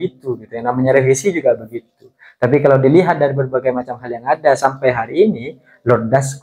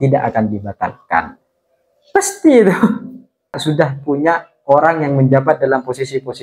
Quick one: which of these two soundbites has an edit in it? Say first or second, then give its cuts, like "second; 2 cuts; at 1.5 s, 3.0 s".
second; 1 cut; at 3.6 s